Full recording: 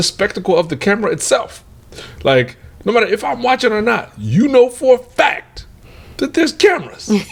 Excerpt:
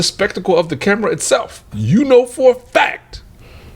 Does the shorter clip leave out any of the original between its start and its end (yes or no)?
yes